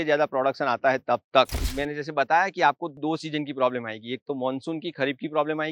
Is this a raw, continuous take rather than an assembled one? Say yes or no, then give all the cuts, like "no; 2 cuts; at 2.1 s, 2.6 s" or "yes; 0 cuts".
no; 2 cuts; at 1.6 s, 2.9 s